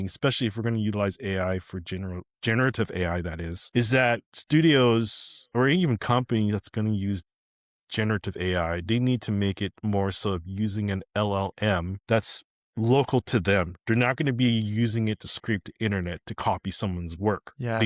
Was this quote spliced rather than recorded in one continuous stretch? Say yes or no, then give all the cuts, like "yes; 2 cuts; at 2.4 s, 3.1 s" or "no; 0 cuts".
yes; 3 cuts; at 3.5 s, 4.3 s, 11.9 s